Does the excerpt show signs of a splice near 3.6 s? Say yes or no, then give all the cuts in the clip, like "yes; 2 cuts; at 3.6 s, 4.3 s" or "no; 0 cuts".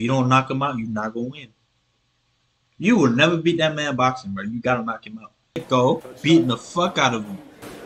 no; 1 cut; at 5.6 s